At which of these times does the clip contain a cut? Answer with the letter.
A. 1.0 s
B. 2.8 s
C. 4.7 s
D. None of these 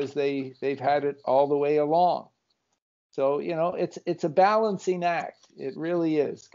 D